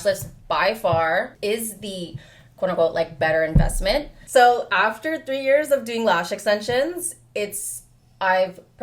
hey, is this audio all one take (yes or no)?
no